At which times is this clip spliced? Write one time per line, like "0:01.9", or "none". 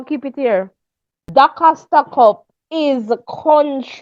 0:01.2